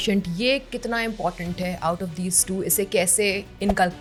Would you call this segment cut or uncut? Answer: uncut